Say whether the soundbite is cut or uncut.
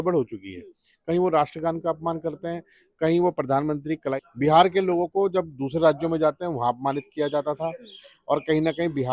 cut